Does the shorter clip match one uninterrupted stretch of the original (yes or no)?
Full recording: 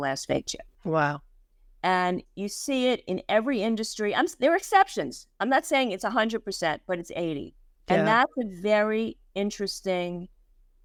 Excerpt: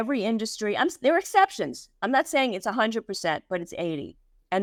yes